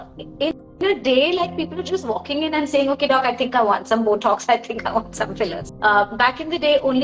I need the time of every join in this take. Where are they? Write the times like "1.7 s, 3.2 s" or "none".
5.6 s

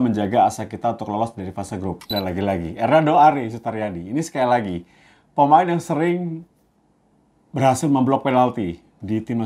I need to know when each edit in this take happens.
2.0 s

